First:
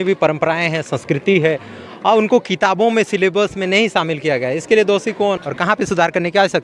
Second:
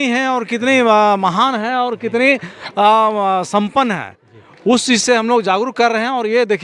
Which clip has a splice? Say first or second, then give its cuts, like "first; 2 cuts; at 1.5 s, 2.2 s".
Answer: first; 1 cut; at 5.4 s